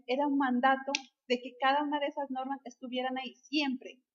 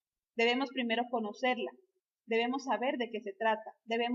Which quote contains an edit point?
first; 1 cut; at 3.1 s

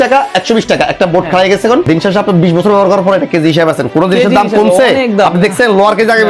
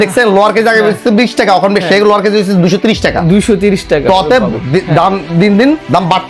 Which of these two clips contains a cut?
first; 1 cut; at 1.8 s

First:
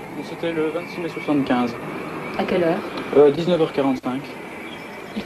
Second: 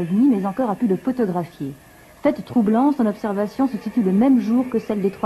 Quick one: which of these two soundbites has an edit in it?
first; 1 cut; at 2.2 s

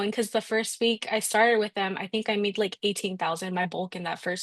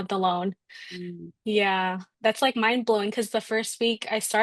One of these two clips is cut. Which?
second; 1 cut; at 2.0 s

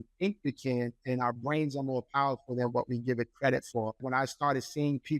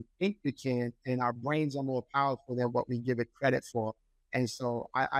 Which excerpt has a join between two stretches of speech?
first; 1 cut; at 4.0 s

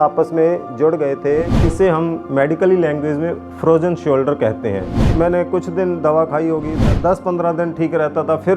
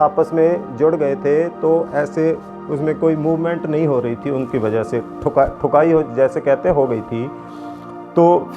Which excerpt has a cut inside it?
first; 3 cuts; at 1.6 s, 5.0 s, 6.7 s

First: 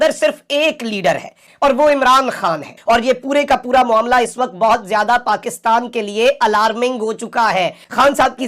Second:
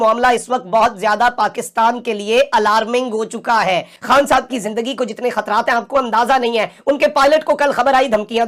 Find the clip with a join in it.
first; 2 cuts; at 1.5 s, 2.8 s

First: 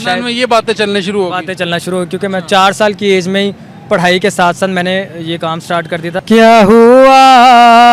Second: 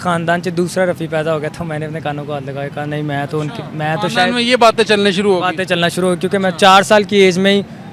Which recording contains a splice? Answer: first; 1 cut; at 6.1 s

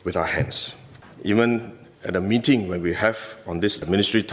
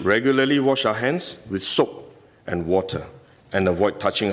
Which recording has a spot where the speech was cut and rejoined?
first; 1 cut; at 1.1 s

